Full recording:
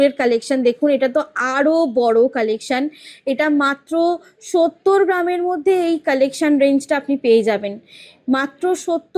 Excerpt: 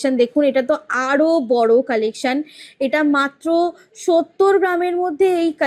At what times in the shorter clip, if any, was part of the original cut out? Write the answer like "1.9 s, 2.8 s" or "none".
none